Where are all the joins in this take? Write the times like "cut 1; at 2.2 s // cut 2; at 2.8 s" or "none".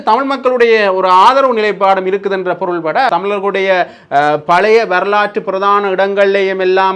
cut 1; at 3.1 s